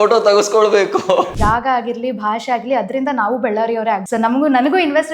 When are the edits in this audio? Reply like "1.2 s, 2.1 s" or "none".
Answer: 1.4 s, 4.0 s